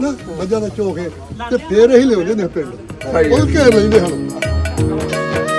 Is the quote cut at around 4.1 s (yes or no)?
yes